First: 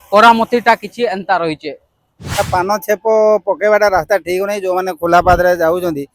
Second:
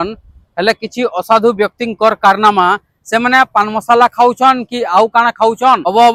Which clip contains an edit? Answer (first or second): first